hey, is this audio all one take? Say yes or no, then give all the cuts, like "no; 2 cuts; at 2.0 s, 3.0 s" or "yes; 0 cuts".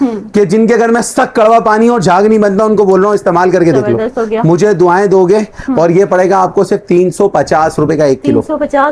yes; 0 cuts